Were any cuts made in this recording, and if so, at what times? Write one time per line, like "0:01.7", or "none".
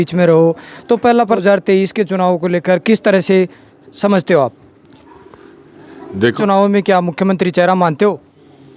0:01.2
0:06.4

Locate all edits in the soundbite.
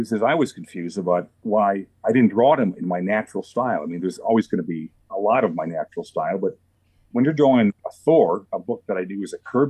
0:01.3

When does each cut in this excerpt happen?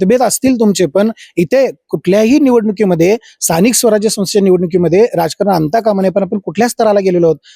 none

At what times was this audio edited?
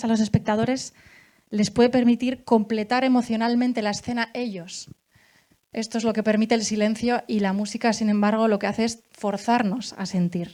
none

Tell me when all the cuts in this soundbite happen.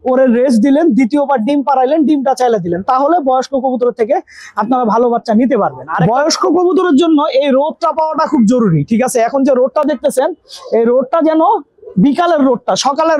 none

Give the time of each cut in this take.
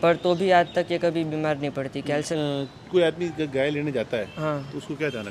0:02.3

